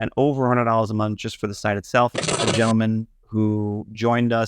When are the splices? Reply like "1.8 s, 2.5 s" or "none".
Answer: 2.4 s